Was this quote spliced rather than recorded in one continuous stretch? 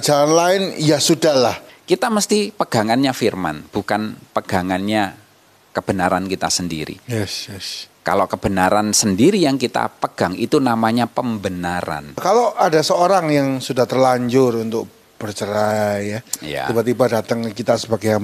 yes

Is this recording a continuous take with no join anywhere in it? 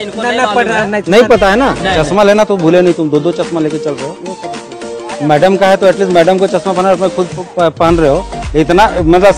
no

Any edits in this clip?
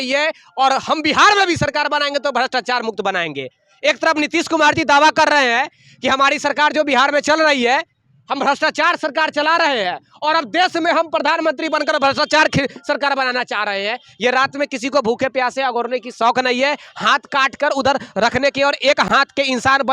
no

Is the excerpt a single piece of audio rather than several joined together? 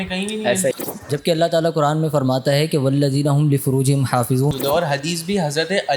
no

